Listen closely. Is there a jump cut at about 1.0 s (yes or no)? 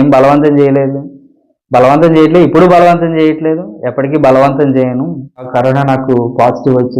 no